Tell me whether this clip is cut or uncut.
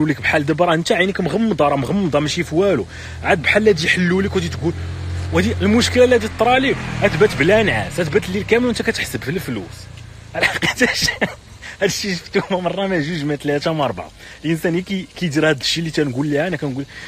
uncut